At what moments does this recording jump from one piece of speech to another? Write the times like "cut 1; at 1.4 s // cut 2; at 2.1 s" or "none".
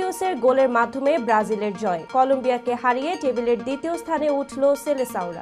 none